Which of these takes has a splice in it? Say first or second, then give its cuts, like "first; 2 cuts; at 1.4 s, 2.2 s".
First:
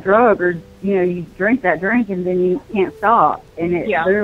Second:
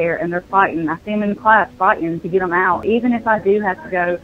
second; 1 cut; at 2.8 s